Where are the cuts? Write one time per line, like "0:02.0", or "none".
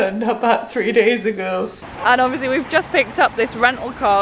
0:01.8

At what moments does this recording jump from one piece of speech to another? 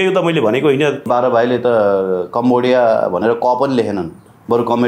0:01.1

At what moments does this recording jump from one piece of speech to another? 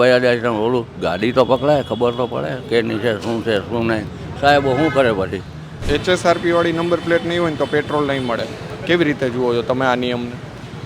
0:05.8

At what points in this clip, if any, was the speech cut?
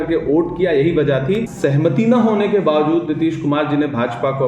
0:01.5

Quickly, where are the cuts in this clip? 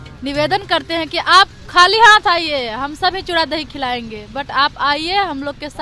none

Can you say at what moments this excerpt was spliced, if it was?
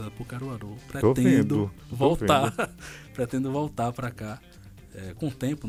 none

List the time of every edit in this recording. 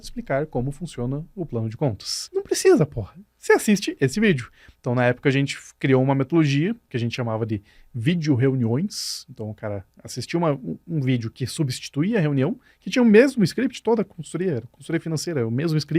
0:02.1
0:06.9

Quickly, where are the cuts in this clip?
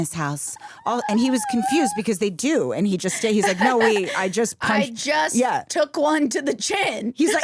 none

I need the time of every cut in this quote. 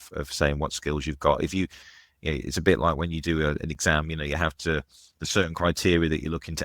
none

